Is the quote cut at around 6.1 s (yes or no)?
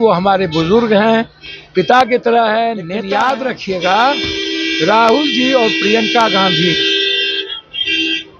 no